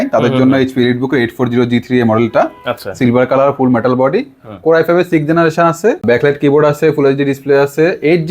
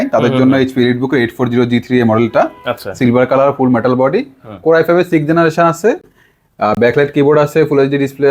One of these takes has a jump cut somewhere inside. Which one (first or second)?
first